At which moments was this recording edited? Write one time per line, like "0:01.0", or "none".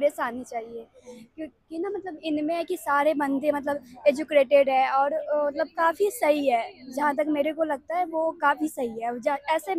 none